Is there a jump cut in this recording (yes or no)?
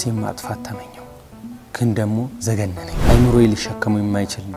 yes